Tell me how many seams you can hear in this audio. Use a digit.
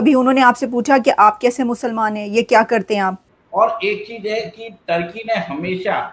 1